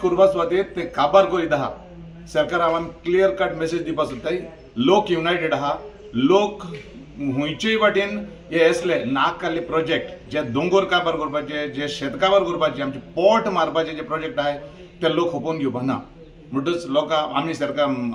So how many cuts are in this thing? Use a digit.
0